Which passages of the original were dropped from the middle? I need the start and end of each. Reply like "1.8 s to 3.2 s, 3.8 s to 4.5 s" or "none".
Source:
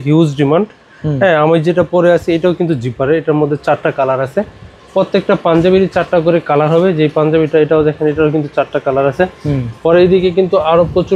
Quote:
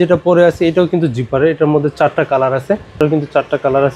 4.7 s to 8.2 s